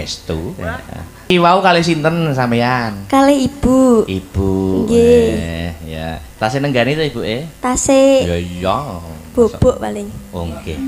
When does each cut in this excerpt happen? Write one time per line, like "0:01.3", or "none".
0:01.2

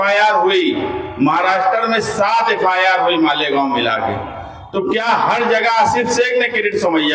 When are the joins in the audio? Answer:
none

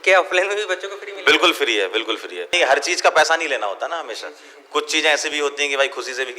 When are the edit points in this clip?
0:02.5

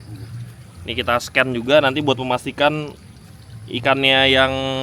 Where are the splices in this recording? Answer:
none

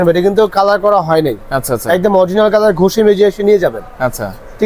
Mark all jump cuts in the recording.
none

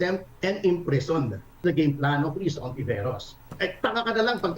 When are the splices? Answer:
0:01.6

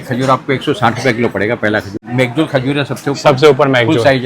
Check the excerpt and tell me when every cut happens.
0:01.9

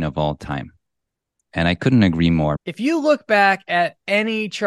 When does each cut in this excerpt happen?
0:02.6

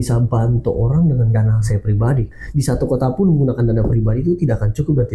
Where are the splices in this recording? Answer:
0:02.3

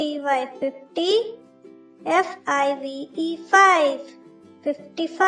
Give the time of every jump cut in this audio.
none

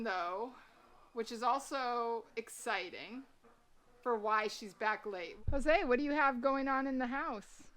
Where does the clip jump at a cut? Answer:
0:05.3

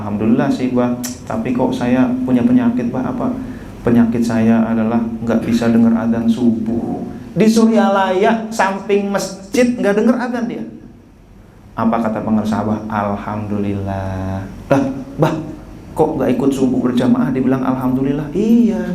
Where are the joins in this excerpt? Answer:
none

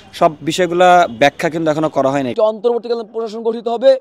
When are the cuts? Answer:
0:02.3

